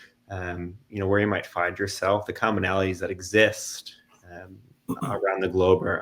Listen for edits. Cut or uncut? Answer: uncut